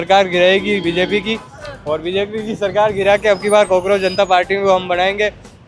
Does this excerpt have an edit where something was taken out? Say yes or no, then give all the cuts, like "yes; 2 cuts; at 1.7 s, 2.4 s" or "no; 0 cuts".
no; 0 cuts